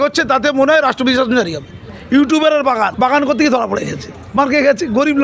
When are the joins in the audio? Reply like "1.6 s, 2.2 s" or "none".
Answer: 1.9 s, 2.9 s